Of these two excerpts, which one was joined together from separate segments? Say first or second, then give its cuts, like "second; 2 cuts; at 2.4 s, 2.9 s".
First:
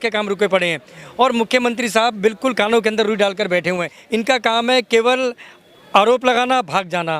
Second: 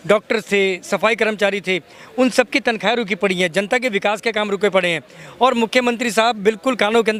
first; 1 cut; at 3.9 s